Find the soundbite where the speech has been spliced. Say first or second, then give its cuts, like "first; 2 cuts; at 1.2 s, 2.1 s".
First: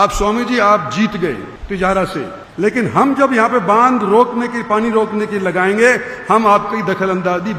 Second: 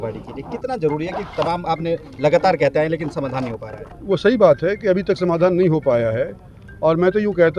first; 2 cuts; at 1.5 s, 2.4 s